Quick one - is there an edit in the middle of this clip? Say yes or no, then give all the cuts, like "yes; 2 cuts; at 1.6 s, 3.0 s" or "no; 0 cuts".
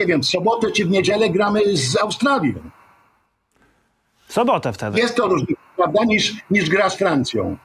no; 0 cuts